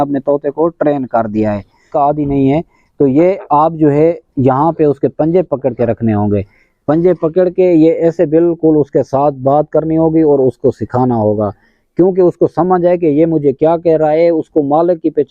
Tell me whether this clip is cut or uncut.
cut